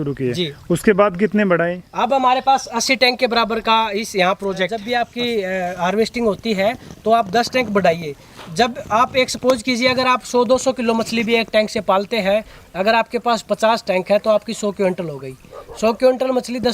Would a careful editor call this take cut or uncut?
cut